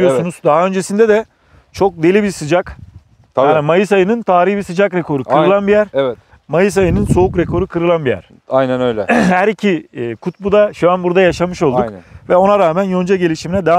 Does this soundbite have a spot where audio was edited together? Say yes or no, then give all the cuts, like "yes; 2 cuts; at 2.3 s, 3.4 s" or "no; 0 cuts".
no; 0 cuts